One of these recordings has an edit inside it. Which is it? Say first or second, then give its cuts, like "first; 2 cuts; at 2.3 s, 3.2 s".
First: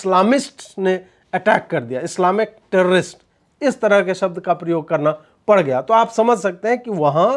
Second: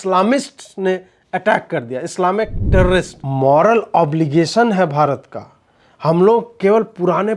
second; 1 cut; at 3.2 s